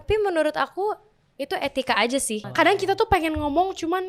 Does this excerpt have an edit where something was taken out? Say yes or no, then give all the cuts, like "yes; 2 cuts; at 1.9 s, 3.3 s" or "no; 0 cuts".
yes; 1 cut; at 2.5 s